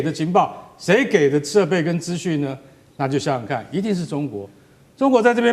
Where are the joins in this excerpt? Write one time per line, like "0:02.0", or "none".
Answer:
none